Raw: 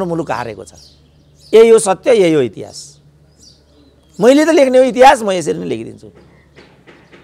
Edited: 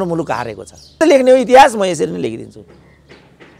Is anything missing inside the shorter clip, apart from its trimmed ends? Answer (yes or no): yes